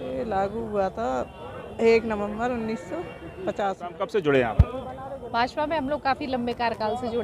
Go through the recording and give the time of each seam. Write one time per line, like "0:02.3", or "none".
0:03.9

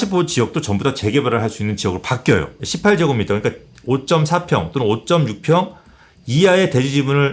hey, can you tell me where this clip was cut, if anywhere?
0:02.6

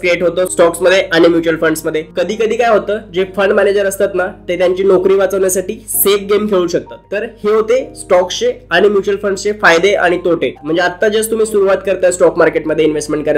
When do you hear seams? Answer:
0:02.1
0:07.0
0:10.6

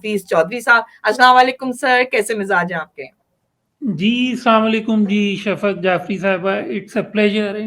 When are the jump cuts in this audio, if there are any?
none

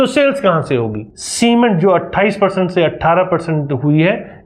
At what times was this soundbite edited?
0:01.1

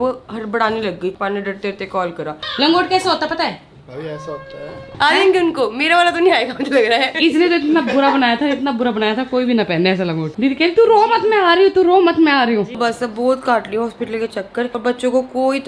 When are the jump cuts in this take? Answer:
0:01.1
0:02.4
0:04.8
0:07.1
0:10.3
0:12.7
0:14.7

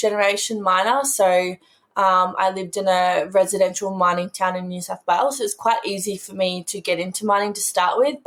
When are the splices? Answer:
none

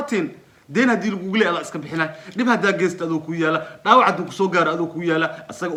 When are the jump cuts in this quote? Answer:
none

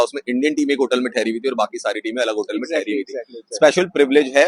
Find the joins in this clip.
none

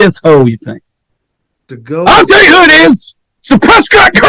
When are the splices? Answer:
0:01.6

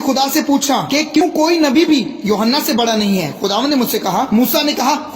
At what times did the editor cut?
0:01.2

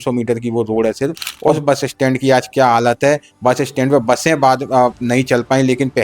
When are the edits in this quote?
0:01.3

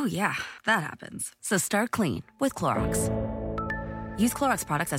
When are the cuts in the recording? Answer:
0:02.7
0:04.1

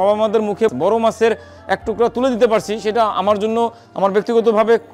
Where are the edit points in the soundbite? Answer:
0:00.7
0:03.8

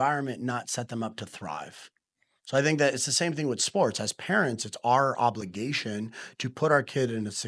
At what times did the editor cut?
none

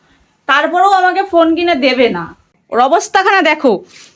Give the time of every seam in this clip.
0:02.6

